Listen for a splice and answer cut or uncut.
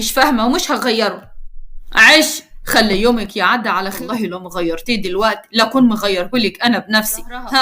cut